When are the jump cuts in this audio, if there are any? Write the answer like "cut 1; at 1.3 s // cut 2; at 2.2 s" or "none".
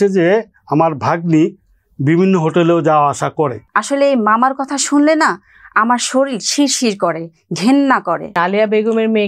cut 1; at 3.7 s // cut 2; at 8.3 s

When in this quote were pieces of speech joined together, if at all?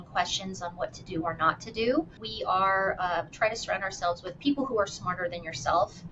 cut 1; at 2.2 s

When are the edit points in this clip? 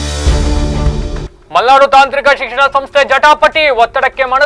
cut 1; at 1.3 s

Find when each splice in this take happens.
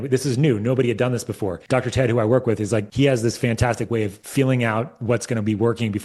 cut 1; at 1.6 s // cut 2; at 2.9 s // cut 3; at 4.2 s

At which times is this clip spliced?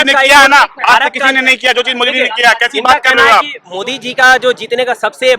cut 1; at 3.6 s

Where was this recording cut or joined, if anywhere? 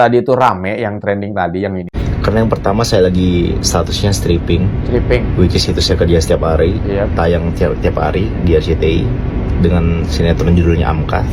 cut 1; at 2.0 s

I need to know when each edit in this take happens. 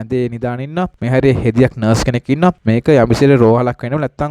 cut 1; at 1.0 s // cut 2; at 2.6 s

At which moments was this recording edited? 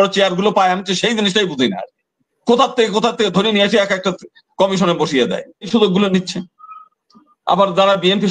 cut 1; at 5.7 s

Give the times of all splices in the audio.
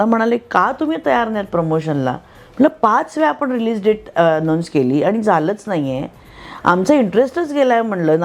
none

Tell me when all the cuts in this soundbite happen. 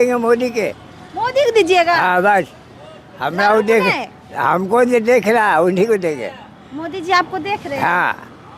none

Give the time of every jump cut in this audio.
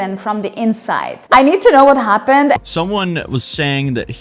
cut 1; at 1.2 s // cut 2; at 2.6 s

